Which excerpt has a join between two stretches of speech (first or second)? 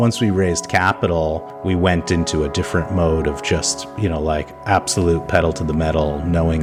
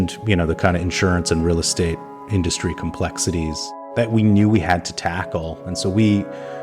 second